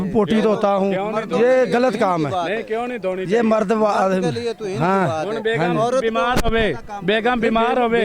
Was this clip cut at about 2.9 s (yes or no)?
no